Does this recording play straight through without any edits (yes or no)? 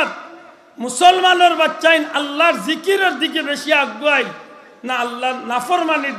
yes